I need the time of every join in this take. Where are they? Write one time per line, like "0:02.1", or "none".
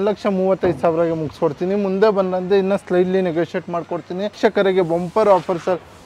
0:04.4